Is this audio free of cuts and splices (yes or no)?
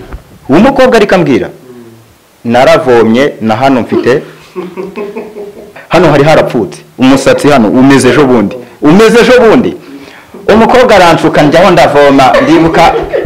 no